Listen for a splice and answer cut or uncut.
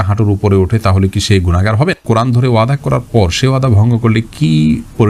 cut